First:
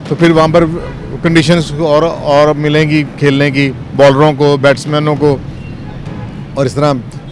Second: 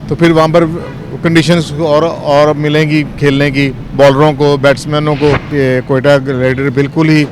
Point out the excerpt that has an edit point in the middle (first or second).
second